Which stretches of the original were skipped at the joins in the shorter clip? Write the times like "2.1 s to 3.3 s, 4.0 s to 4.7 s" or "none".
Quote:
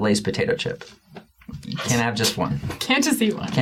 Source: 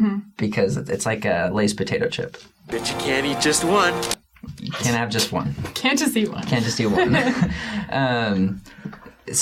2.7 s to 4.1 s